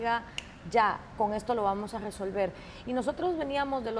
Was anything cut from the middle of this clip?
no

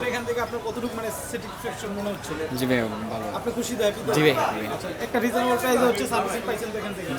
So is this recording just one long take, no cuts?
yes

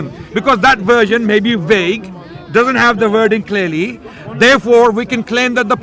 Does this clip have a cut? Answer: no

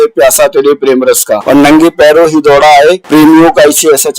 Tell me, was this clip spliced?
yes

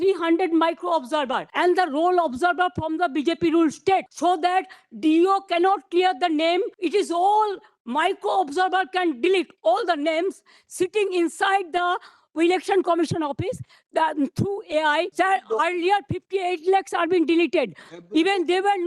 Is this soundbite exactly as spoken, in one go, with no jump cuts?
no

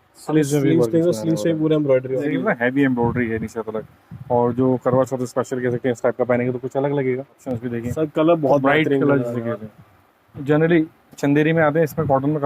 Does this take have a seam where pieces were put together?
yes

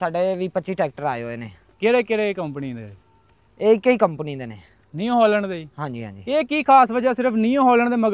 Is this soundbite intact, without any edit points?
yes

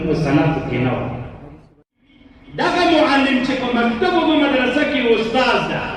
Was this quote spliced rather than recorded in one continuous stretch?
yes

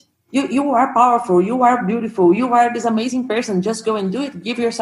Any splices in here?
no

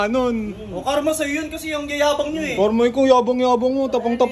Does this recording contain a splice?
no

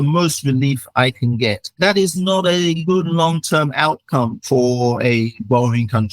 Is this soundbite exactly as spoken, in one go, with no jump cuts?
no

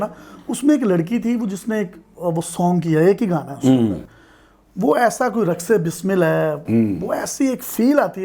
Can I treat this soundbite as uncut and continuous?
yes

